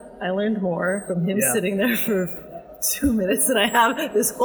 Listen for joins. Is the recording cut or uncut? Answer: cut